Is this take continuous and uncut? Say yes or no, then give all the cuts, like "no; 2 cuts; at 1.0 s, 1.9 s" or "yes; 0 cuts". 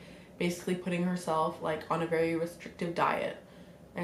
yes; 0 cuts